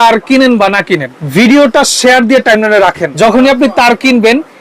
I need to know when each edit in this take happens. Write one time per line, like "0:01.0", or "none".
0:01.2
0:03.1